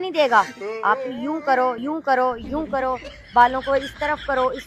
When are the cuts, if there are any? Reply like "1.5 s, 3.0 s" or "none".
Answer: none